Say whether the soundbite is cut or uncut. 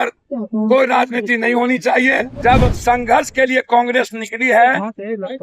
cut